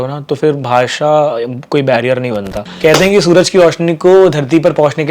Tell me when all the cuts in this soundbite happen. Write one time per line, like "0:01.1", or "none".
0:02.6